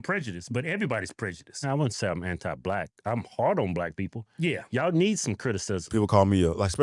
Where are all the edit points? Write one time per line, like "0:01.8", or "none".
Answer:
0:01.5
0:05.9